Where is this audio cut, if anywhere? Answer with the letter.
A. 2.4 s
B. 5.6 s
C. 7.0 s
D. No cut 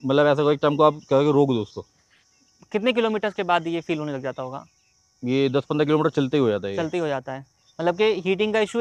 D